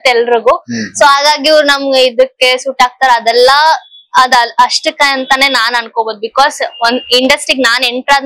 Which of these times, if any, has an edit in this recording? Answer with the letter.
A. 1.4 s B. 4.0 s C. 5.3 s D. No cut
D